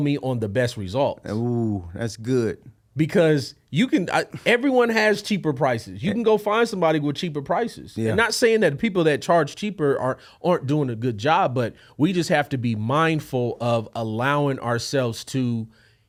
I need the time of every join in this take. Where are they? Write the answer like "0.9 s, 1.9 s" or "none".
none